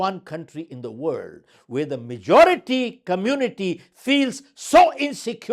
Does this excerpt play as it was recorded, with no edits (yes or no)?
yes